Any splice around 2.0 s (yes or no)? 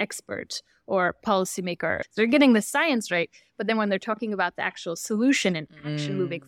yes